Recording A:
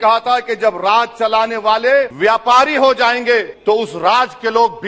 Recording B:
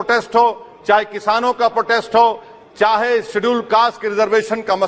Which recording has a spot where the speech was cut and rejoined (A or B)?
A